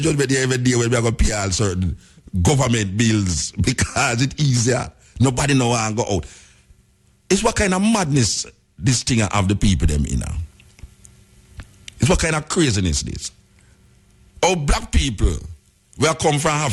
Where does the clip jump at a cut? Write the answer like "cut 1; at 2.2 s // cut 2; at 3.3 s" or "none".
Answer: none

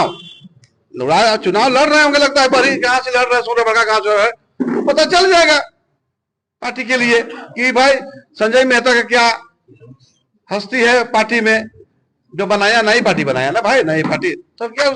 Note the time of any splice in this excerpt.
none

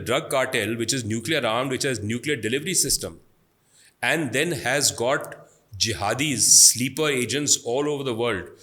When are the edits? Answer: none

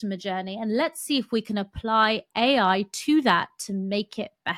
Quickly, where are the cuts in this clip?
none

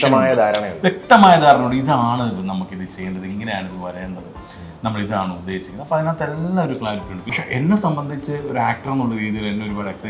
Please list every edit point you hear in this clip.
cut 1; at 7.3 s

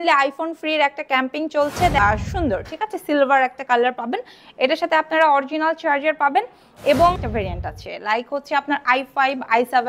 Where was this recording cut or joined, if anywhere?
cut 1; at 2.0 s // cut 2; at 7.2 s

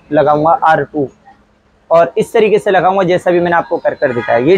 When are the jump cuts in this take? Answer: none

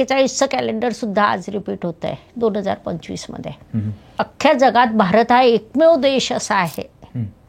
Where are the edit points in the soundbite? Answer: cut 1; at 4.0 s

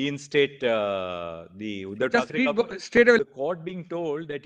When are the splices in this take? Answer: cut 1; at 3.2 s

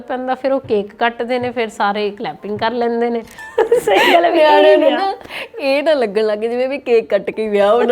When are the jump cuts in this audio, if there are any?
cut 1; at 3.4 s

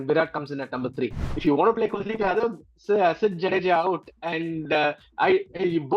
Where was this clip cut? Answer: cut 1; at 1.2 s

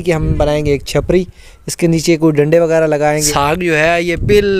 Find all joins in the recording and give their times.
cut 1; at 3.2 s

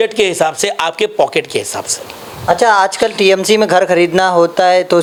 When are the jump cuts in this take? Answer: none

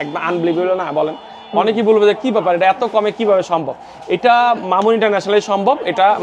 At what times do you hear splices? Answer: none

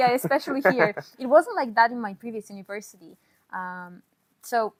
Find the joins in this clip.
none

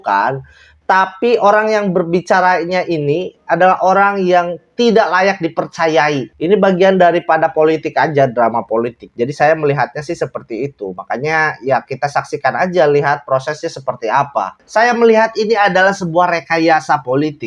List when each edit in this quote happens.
cut 1; at 6.3 s // cut 2; at 14.5 s

